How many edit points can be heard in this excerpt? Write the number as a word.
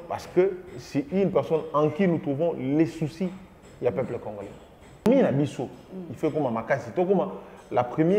one